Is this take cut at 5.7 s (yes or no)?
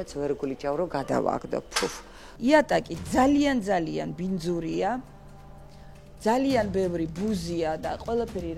no